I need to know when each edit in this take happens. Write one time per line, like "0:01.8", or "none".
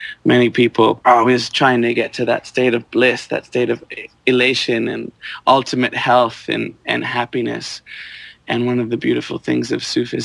0:01.0